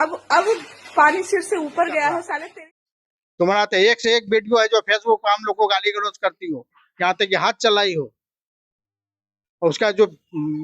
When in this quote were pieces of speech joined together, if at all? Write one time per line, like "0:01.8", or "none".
0:02.5

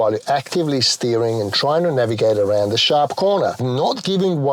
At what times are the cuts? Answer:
0:03.6

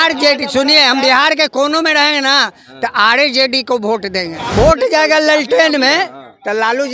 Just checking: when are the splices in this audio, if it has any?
0:04.4

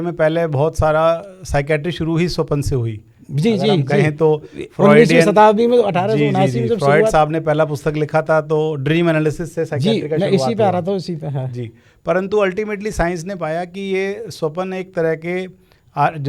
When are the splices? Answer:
none

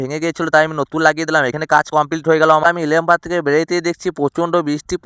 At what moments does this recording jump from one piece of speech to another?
0:02.6

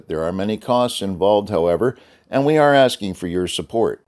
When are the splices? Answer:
none

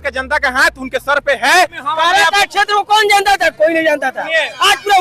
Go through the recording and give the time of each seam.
0:01.8

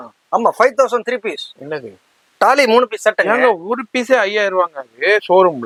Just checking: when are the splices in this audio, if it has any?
none

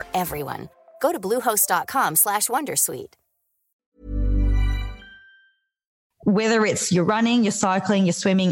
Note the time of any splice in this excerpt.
0:06.0

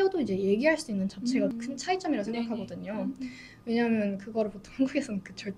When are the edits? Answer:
0:01.5

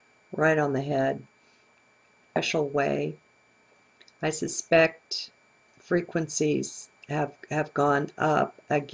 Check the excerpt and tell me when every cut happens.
none

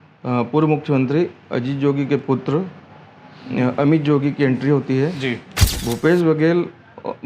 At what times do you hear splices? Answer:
0:05.6

